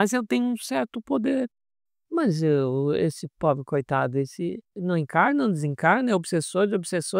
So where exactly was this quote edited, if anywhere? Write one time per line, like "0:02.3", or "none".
0:01.6